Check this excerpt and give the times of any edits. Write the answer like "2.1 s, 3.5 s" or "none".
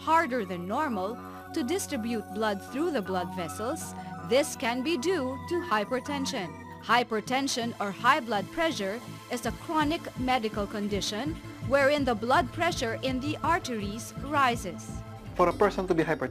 5.9 s